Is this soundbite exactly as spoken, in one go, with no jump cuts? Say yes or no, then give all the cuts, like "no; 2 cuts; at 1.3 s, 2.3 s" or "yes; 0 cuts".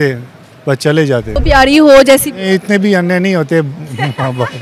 no; 1 cut; at 1.4 s